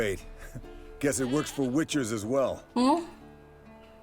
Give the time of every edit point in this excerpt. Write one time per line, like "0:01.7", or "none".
0:02.6